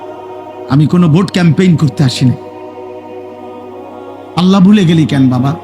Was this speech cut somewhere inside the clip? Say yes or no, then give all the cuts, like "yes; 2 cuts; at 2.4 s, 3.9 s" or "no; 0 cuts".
yes; 2 cuts; at 2.4 s, 4.3 s